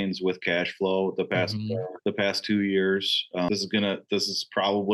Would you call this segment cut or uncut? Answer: uncut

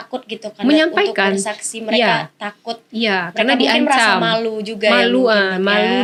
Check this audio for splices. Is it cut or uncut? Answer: uncut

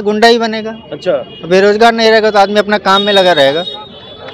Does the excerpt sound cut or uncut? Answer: uncut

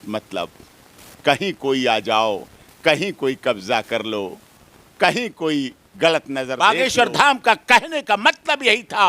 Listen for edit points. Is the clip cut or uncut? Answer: cut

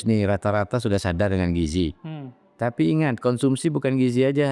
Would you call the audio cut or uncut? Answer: uncut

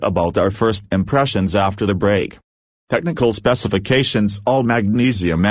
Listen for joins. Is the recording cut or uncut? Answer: cut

